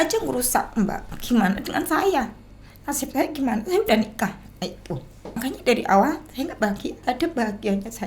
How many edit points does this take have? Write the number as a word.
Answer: three